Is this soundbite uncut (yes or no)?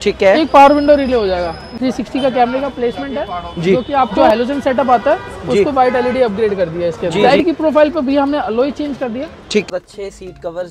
no